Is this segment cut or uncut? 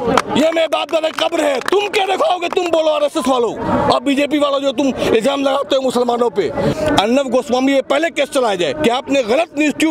cut